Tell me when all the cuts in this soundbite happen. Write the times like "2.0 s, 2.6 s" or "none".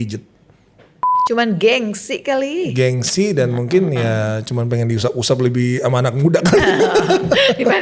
1.1 s